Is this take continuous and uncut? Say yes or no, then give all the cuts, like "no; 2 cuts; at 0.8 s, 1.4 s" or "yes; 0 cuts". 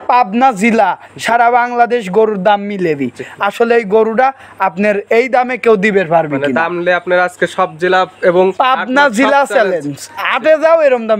yes; 0 cuts